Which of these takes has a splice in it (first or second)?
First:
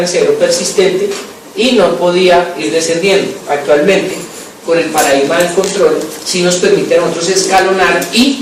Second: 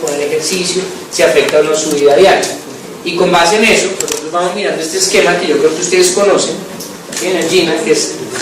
second